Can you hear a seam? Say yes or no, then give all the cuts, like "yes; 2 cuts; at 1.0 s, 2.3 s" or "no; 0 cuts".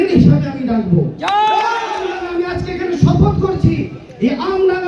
yes; 1 cut; at 1.9 s